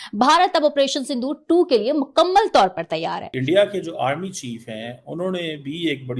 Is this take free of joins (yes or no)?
no